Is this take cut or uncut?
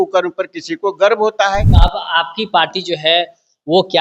cut